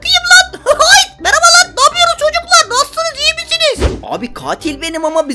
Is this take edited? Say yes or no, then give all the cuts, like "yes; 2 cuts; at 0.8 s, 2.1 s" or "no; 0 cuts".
yes; 1 cut; at 3.9 s